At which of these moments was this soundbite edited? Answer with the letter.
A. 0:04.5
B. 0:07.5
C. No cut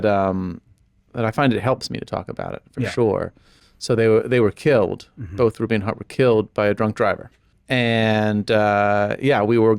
B